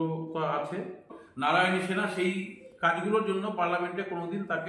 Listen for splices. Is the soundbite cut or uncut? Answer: cut